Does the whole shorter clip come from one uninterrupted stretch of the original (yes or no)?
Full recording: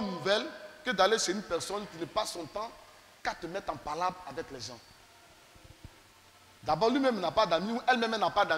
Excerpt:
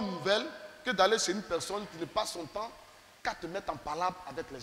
yes